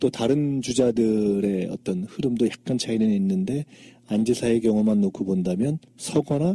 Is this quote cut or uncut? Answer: cut